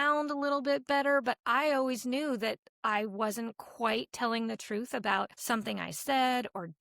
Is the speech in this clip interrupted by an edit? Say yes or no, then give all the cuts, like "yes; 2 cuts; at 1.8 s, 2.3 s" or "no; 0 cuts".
yes; 1 cut; at 5.3 s